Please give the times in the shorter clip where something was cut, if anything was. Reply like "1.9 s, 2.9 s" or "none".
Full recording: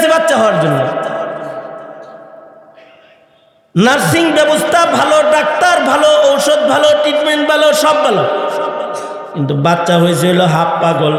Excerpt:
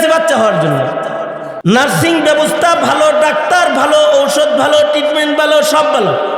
1.5 s